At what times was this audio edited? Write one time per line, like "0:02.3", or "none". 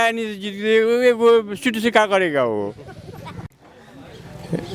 0:03.5